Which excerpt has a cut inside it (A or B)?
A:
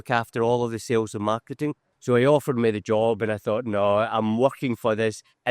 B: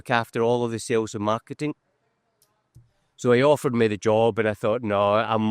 A